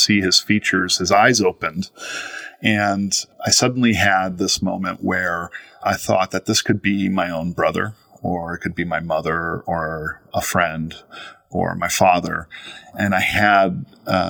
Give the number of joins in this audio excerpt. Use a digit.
3